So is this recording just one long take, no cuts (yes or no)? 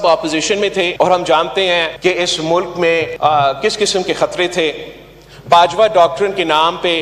no